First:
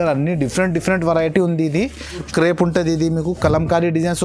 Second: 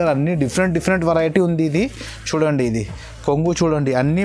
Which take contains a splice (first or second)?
first